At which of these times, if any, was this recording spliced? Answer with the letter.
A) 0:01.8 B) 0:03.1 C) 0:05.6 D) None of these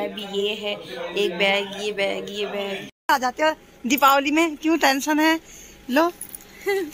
B